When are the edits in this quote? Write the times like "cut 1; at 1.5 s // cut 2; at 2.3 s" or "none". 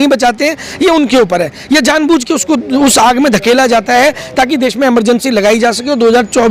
none